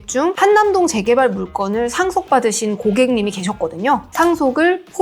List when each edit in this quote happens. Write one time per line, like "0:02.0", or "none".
0:04.1

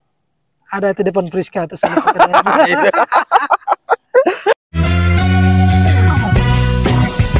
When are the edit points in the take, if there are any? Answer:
0:04.5

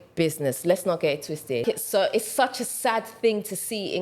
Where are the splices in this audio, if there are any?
0:01.6

